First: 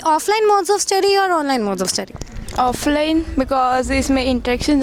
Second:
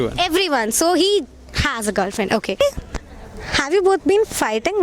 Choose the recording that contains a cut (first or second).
second